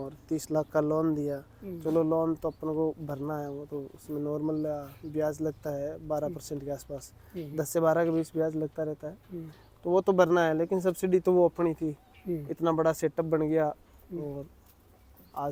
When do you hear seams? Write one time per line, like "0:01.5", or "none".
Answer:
none

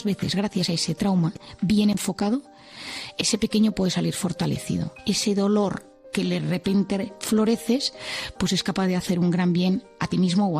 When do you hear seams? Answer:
0:04.9

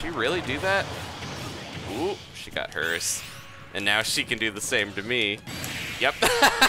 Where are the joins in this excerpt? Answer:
none

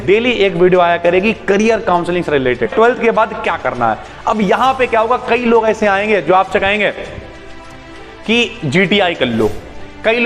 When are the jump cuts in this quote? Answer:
0:02.7

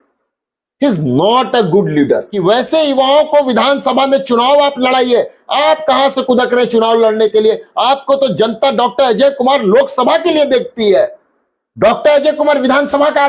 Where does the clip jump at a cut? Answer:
0:02.3

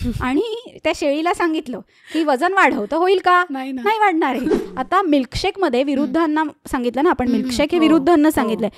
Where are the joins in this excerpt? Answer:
0:04.6

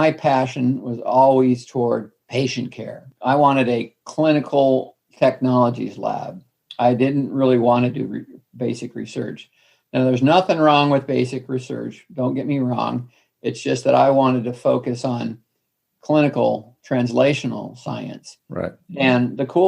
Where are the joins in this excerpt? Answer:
0:02.2
0:05.0

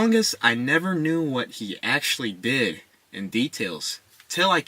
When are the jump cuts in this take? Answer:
0:03.1

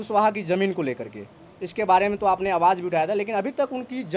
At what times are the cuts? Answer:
none

